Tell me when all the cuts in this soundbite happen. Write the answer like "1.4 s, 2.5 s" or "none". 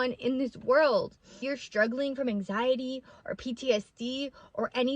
1.6 s